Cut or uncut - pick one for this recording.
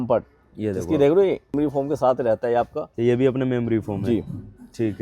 cut